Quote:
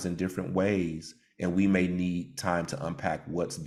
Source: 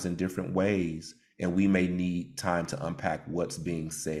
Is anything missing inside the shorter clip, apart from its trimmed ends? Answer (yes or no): no